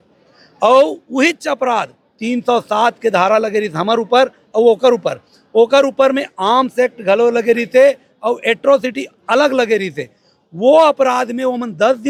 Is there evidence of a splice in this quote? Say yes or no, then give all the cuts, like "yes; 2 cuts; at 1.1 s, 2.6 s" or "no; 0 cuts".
no; 0 cuts